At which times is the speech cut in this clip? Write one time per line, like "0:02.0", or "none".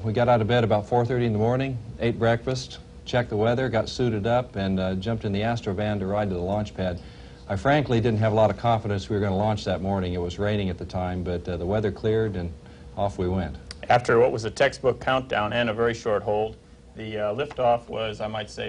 none